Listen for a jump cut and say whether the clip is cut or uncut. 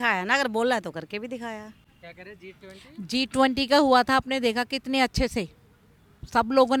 uncut